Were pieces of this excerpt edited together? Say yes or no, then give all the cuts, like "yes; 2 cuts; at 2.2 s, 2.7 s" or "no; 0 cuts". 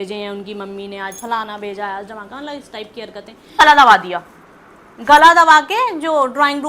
yes; 1 cut; at 3.6 s